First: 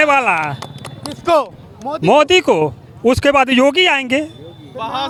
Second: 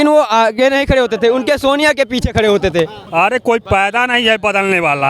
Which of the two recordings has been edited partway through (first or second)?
second